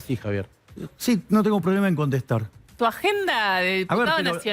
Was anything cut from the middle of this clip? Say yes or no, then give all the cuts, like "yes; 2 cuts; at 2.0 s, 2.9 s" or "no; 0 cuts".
yes; 1 cut; at 2.6 s